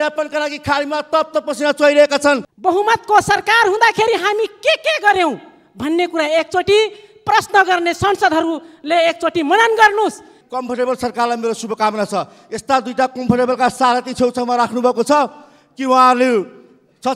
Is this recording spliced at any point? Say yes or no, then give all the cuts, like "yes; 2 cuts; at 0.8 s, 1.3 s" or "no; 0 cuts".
yes; 2 cuts; at 2.5 s, 10.3 s